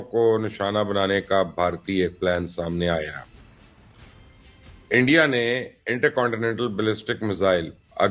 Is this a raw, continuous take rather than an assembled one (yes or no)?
yes